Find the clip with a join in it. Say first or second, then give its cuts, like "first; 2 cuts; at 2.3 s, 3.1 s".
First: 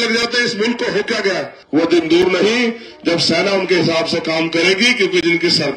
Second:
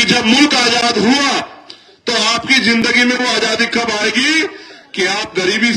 first; 1 cut; at 1.5 s